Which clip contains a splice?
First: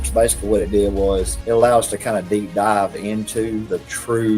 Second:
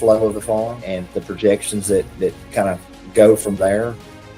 first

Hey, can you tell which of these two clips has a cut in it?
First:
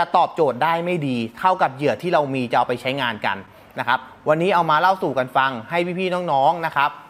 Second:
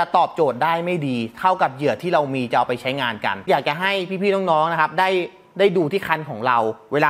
second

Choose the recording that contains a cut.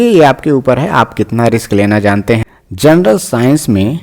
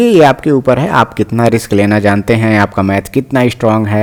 first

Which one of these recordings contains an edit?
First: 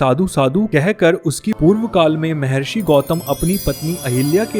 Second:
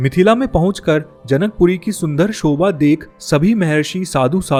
first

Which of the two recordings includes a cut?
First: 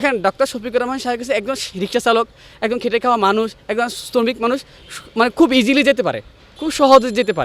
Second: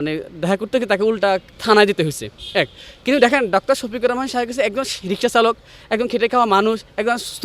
second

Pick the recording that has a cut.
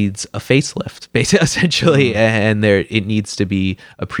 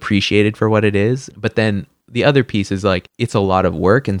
second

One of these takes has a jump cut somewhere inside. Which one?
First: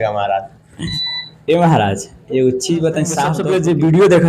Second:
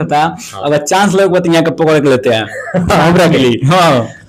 first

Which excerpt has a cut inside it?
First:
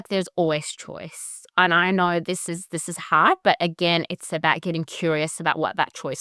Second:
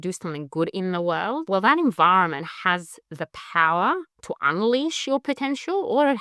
second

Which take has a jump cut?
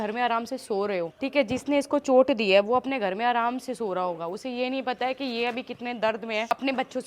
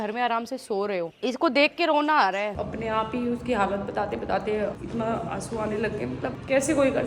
second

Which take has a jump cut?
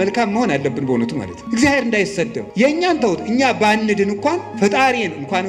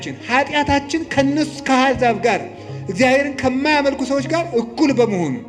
first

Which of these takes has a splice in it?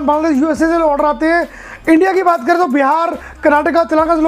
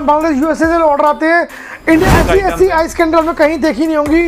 second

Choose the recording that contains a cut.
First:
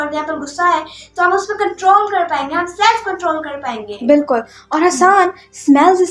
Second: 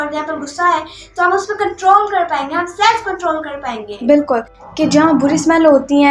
second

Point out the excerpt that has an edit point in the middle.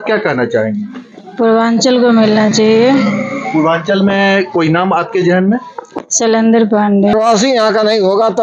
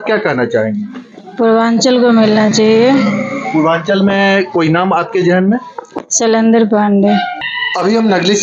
first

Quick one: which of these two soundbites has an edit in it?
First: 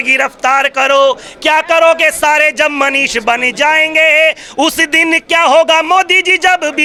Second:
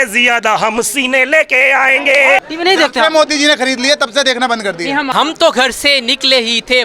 second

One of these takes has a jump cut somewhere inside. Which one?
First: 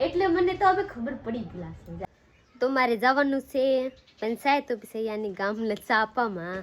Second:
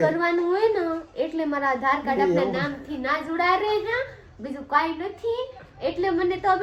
first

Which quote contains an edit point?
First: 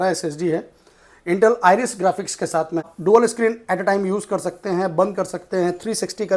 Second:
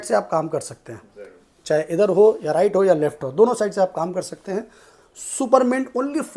first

